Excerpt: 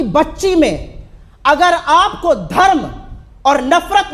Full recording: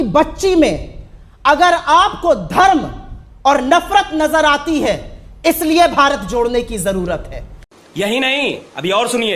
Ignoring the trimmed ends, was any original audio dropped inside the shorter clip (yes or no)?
no